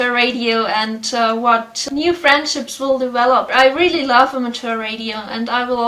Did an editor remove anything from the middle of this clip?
yes; 2 cuts; at 1.8 s, 3.5 s

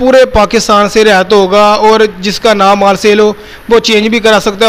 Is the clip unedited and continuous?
yes; 0 cuts

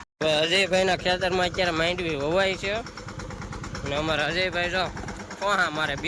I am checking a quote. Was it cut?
no; 0 cuts

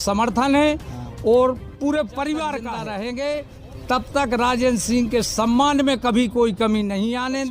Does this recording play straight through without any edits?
no; 1 cut; at 2.8 s

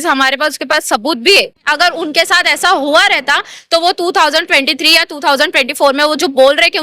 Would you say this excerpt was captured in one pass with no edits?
no; 1 cut; at 1.6 s

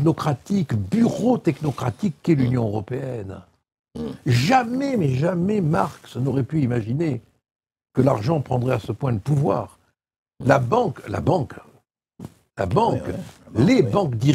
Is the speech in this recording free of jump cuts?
yes; 0 cuts

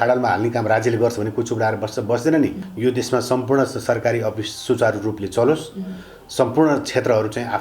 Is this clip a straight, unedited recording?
no; 1 cut; at 2.6 s

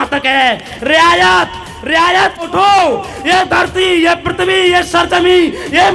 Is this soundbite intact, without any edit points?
no; 1 cut; at 2.4 s

